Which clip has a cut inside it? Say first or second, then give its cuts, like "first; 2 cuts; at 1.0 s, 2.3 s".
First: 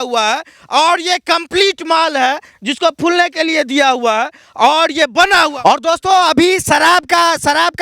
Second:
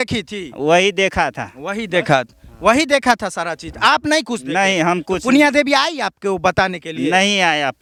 first; 1 cut; at 5.5 s